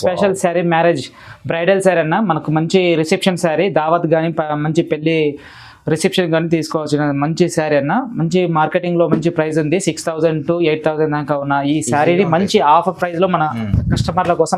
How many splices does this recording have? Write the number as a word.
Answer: zero